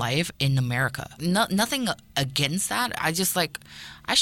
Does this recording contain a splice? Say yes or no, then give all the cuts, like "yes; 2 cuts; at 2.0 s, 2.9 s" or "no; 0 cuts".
yes; 1 cut; at 1.2 s